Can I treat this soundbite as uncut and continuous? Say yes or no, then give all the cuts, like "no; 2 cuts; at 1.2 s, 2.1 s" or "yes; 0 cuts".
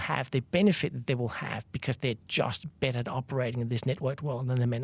yes; 0 cuts